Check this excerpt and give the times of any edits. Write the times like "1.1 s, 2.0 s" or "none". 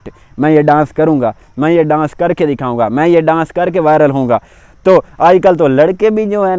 none